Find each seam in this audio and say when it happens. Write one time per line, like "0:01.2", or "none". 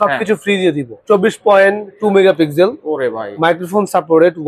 0:00.9